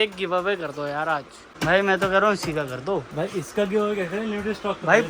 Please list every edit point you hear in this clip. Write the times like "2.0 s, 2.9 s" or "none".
1.4 s